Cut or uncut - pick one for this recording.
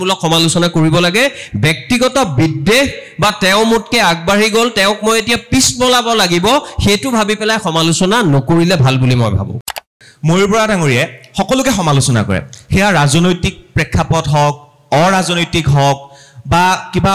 cut